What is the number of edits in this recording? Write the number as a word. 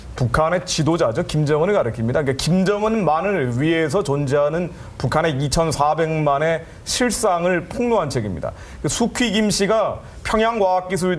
one